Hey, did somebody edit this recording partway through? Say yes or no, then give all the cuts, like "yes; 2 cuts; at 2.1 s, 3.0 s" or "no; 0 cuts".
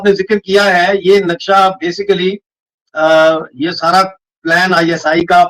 no; 0 cuts